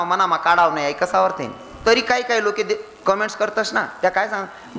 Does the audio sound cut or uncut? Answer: cut